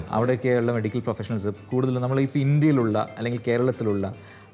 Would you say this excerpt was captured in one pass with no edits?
yes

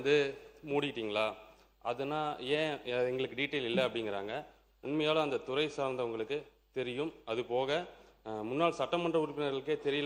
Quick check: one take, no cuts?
yes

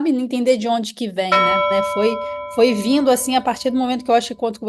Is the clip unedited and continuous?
no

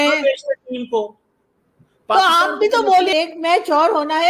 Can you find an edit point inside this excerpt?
yes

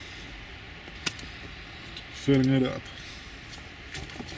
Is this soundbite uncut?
no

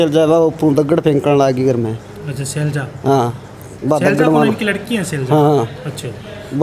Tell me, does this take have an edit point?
no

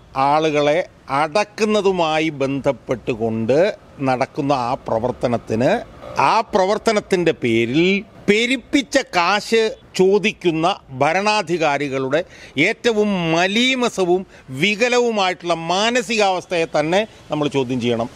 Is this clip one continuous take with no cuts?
no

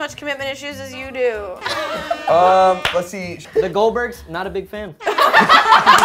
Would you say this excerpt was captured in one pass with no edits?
no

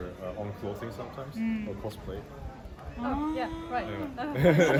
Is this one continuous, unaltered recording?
yes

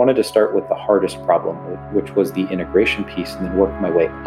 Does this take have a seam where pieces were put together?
no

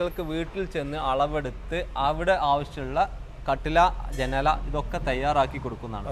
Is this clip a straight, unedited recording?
yes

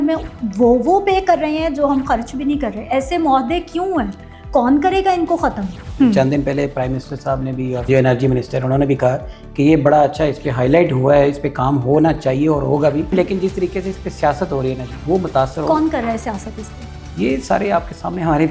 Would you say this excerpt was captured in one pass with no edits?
no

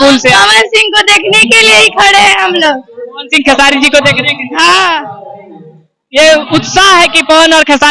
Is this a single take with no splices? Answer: yes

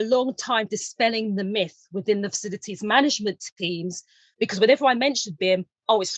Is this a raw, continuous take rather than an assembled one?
yes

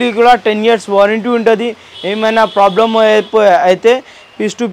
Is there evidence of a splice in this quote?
no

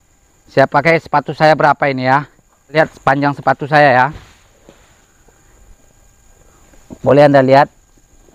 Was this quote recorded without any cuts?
no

